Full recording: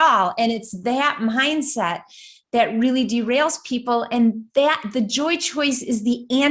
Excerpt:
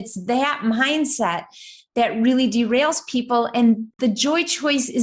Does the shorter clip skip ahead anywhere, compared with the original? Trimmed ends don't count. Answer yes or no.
yes